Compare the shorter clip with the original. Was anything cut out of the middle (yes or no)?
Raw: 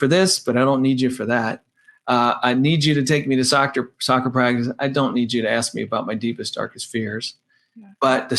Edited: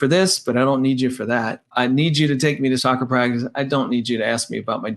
yes